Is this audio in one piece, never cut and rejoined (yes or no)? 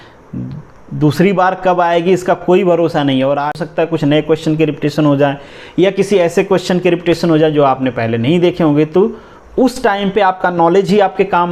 no